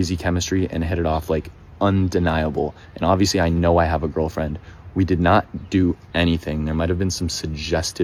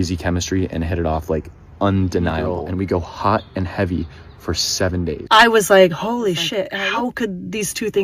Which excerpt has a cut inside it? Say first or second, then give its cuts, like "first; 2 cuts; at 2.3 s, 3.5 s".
second; 3 cuts; at 2.6 s, 5.2 s, 6.7 s